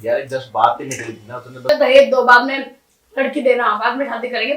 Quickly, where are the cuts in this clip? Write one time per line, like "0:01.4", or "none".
0:01.7